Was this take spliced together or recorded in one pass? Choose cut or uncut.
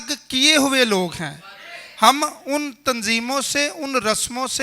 uncut